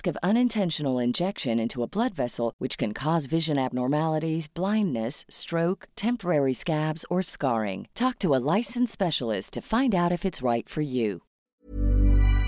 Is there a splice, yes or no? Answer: yes